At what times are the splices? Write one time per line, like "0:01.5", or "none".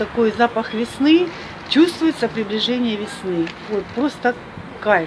none